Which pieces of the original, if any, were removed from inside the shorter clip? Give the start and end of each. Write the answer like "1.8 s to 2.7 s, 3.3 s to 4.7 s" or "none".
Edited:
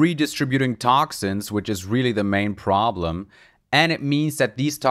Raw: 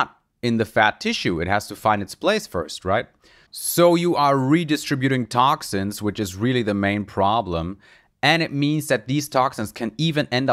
none